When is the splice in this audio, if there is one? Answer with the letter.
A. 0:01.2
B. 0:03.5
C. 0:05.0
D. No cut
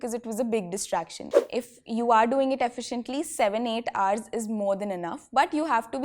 A